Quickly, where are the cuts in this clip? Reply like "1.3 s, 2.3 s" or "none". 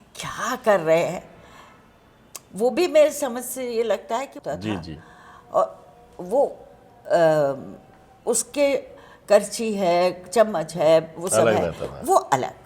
4.4 s